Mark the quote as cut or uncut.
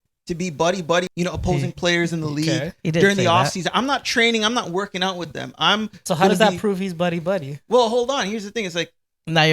cut